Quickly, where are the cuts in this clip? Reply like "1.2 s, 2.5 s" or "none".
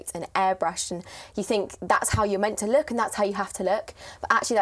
none